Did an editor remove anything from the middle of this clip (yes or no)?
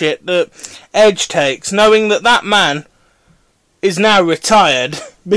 yes